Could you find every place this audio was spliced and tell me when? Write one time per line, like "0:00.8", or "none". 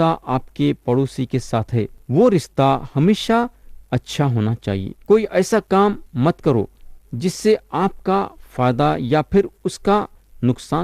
0:02.0
0:04.9